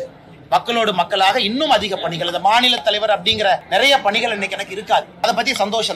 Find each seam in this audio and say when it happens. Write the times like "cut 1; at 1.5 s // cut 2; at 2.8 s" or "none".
cut 1; at 3.6 s // cut 2; at 5.2 s